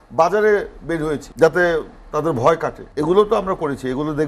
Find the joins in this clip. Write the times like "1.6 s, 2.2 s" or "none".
1.3 s, 2.8 s